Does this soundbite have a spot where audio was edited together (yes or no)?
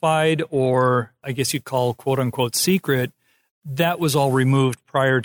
yes